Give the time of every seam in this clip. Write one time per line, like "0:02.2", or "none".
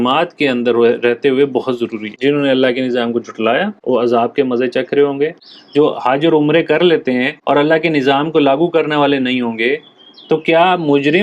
0:02.1
0:05.4